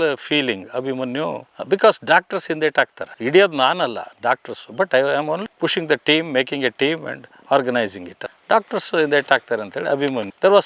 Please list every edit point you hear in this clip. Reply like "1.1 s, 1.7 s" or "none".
none